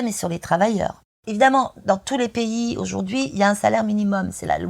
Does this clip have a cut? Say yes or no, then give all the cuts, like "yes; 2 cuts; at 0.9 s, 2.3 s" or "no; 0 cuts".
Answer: yes; 1 cut; at 1.0 s